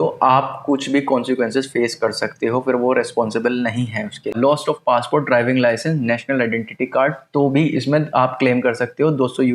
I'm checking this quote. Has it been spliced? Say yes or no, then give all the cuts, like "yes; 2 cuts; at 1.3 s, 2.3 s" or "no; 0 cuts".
yes; 1 cut; at 4.3 s